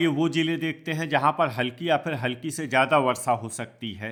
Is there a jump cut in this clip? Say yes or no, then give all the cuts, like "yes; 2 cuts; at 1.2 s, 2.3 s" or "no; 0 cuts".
no; 0 cuts